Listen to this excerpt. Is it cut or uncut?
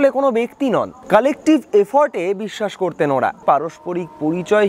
cut